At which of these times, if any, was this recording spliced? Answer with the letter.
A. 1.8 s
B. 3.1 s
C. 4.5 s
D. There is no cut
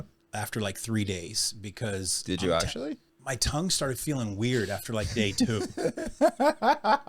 D